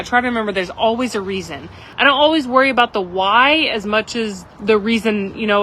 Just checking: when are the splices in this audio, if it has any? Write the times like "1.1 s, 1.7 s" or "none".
1.8 s, 4.4 s